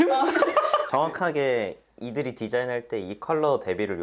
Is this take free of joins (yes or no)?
yes